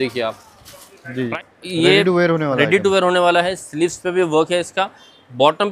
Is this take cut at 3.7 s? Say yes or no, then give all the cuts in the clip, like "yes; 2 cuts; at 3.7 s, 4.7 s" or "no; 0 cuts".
no; 1 cut; at 1.3 s